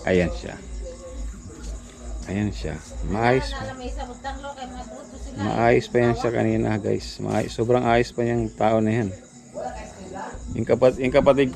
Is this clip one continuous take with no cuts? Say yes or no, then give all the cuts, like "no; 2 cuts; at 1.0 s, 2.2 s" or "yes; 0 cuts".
yes; 0 cuts